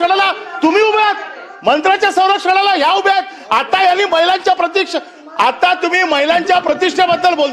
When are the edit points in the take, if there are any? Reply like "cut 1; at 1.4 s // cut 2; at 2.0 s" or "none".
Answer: none